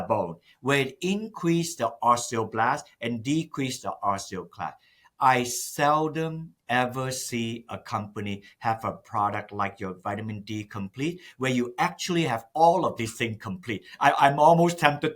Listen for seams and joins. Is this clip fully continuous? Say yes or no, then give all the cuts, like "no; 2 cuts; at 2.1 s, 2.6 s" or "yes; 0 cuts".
yes; 0 cuts